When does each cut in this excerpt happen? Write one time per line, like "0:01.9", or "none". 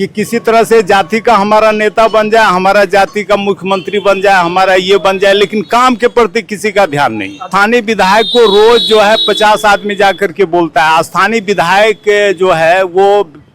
0:07.5